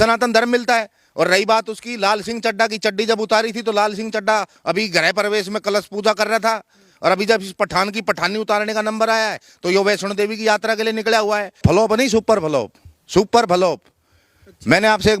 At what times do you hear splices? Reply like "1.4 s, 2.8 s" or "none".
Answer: 11.6 s